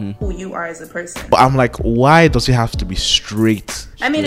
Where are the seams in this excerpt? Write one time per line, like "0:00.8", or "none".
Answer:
0:01.3

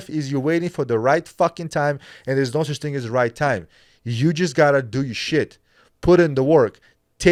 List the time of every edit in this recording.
none

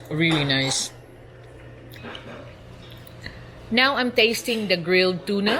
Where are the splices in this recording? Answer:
0:02.0

